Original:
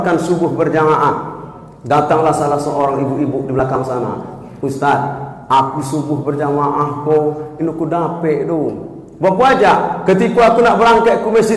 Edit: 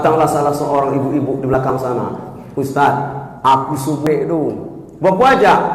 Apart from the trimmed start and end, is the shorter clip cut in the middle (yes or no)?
yes